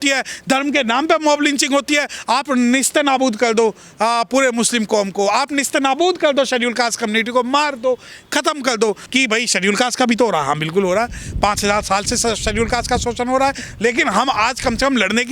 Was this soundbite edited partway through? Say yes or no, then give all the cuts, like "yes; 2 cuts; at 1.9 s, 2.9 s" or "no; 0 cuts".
yes; 2 cuts; at 2.2 s, 9.0 s